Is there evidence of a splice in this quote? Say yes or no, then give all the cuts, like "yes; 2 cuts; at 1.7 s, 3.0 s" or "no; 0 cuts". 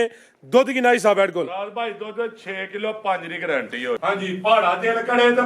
yes; 1 cut; at 4.0 s